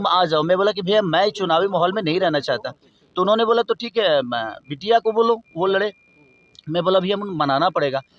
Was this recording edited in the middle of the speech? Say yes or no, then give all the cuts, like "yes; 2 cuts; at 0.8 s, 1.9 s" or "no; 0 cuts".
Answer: no; 0 cuts